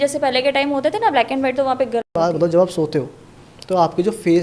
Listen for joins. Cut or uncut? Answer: cut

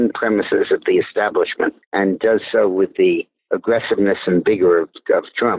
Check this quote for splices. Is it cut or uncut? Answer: uncut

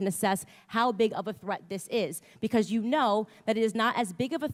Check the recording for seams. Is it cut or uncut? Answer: uncut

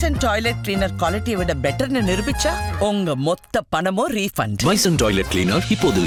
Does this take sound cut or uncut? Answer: uncut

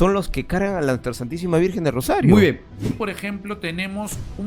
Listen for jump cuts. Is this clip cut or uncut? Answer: cut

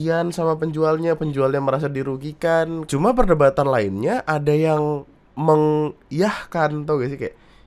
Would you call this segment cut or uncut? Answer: cut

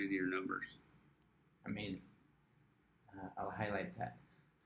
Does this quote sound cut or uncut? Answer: uncut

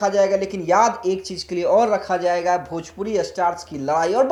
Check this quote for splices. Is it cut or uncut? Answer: uncut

